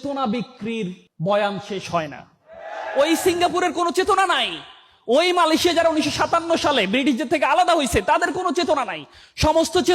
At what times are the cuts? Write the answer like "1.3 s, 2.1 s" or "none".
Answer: none